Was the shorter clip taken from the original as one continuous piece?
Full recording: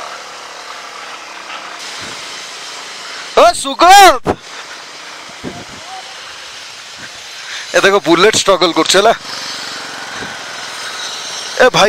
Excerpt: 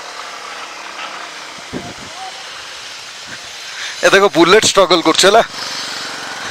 no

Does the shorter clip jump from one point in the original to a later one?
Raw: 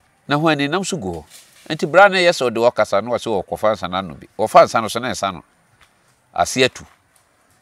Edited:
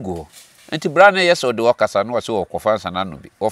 no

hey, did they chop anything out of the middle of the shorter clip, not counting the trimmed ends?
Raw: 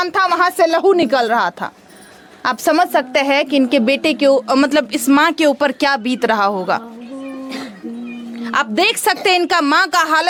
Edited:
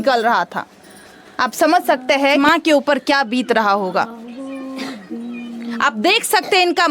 yes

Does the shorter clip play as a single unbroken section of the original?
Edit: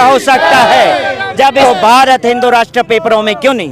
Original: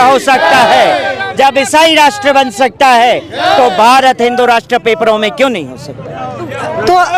no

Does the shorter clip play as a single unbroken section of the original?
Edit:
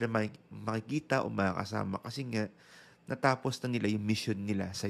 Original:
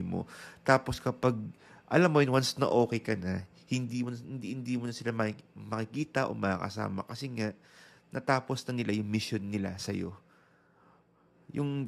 yes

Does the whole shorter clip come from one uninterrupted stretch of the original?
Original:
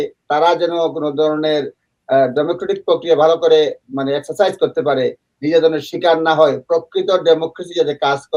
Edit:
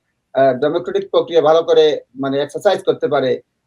yes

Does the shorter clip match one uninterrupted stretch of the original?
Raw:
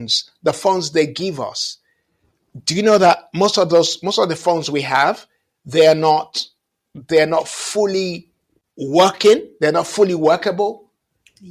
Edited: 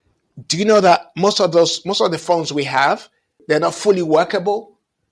no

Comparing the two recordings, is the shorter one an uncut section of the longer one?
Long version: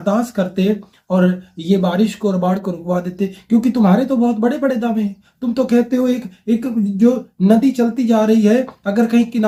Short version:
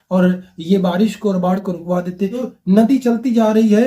no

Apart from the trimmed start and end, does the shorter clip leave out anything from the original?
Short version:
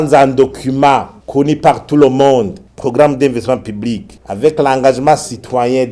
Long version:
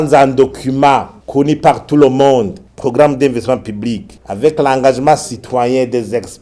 no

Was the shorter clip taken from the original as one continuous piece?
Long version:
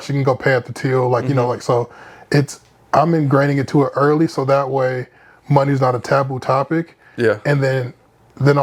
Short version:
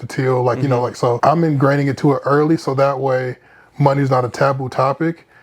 no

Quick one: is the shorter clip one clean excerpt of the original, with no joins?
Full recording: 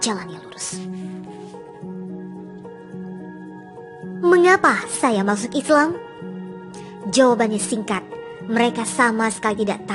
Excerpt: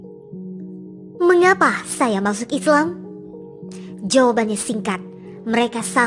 no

